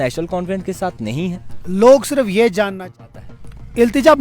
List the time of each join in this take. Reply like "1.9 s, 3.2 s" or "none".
2.9 s